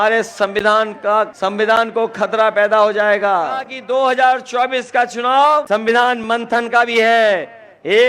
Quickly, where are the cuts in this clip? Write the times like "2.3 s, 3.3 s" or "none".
1.3 s, 3.7 s, 5.7 s